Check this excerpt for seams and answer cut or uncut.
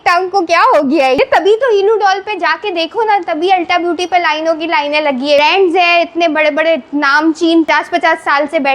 cut